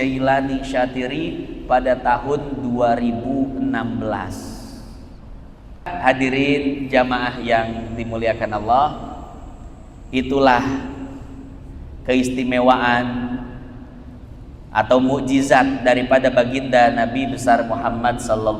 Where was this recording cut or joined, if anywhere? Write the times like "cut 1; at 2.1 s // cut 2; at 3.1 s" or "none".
cut 1; at 5.9 s